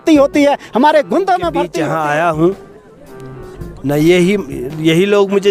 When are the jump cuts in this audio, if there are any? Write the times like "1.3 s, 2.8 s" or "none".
1.7 s